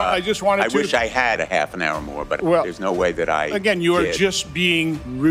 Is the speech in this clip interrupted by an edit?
no; 0 cuts

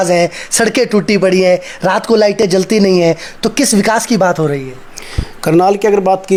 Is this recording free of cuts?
yes; 0 cuts

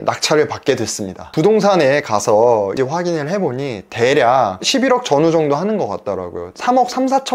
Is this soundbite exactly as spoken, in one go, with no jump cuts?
no; 2 cuts; at 1.2 s, 2.7 s

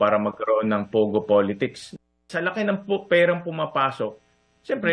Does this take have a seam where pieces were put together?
no; 0 cuts

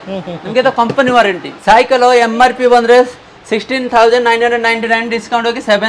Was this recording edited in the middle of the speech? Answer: yes; 1 cut; at 1.5 s

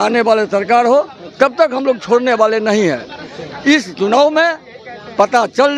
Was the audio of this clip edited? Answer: no; 0 cuts

